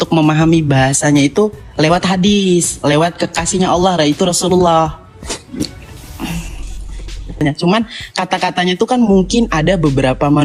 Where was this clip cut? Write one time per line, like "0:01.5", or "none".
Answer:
0:07.4